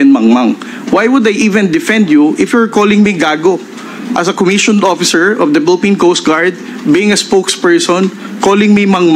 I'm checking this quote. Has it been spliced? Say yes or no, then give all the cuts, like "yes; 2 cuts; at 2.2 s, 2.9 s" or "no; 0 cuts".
no; 0 cuts